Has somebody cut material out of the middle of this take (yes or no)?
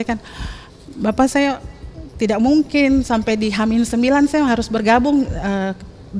no